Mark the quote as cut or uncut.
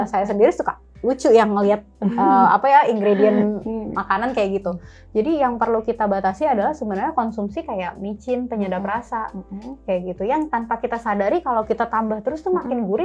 uncut